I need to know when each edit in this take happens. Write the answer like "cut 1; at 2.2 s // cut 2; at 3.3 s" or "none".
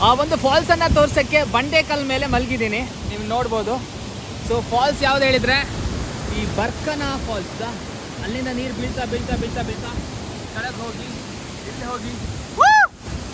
none